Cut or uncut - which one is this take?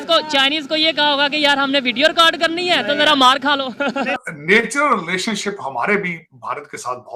cut